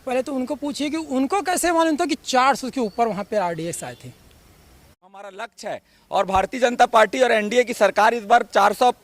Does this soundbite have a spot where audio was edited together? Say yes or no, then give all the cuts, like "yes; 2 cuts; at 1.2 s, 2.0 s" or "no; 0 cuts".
yes; 1 cut; at 4.8 s